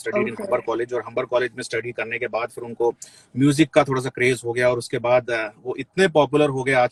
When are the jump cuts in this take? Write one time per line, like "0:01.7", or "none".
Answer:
none